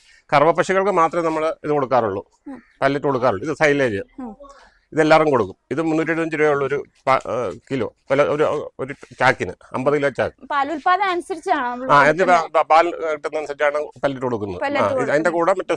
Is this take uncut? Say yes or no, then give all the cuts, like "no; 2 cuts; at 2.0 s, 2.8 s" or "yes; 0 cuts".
yes; 0 cuts